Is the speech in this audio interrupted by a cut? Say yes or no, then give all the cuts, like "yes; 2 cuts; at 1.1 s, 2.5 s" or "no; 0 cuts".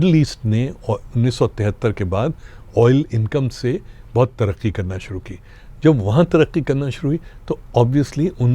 no; 0 cuts